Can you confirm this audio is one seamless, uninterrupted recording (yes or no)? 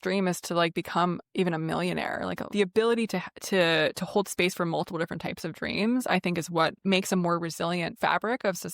no